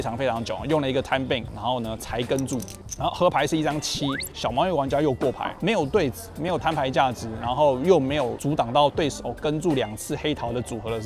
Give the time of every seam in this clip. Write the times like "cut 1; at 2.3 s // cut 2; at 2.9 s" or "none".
cut 1; at 1.5 s // cut 2; at 5.5 s